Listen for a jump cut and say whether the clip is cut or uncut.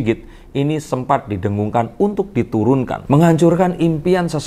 cut